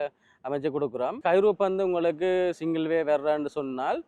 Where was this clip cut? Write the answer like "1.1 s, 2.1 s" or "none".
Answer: 1.2 s